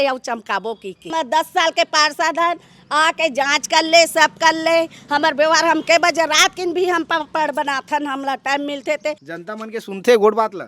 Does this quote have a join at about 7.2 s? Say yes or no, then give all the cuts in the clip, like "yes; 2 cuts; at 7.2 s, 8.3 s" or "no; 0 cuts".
no; 2 cuts; at 1.1 s, 9.3 s